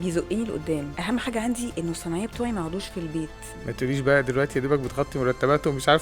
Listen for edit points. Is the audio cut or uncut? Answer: cut